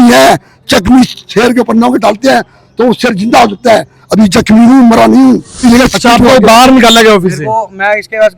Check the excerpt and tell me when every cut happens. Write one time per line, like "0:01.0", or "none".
0:05.6